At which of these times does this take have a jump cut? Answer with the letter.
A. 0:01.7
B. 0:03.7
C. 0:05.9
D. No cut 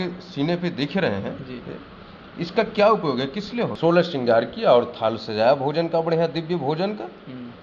B